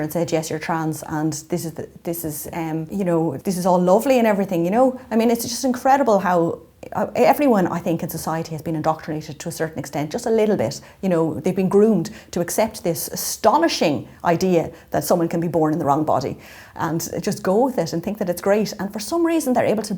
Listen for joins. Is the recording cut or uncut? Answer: cut